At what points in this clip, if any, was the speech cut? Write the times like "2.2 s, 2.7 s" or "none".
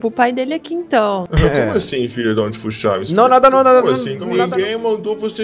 1.3 s, 4.2 s